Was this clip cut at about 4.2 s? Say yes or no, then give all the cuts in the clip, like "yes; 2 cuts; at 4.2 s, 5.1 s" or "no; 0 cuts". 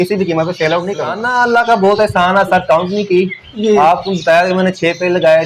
no; 1 cut; at 1.2 s